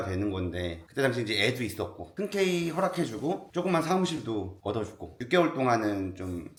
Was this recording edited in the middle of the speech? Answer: no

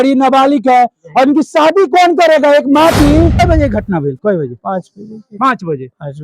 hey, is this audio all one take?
no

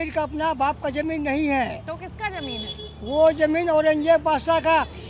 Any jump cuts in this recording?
no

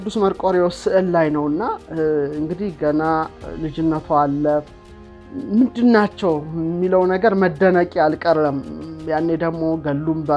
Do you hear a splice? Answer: no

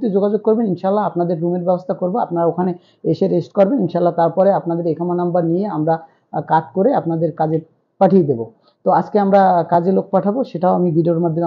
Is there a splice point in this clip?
no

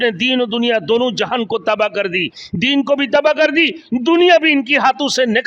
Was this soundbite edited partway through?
no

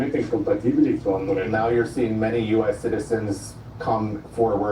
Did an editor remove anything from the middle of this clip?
yes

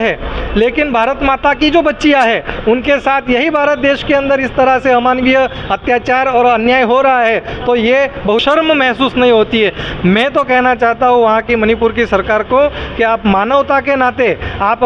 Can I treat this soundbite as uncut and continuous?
no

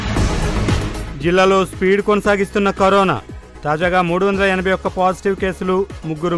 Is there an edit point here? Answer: yes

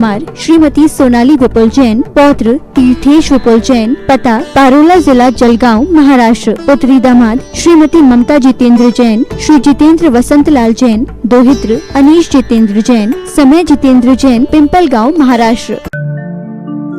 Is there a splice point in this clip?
yes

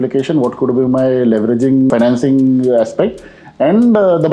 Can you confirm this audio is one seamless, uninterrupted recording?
no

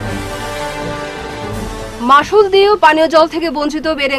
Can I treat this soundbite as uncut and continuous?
no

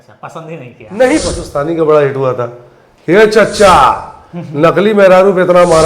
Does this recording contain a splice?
yes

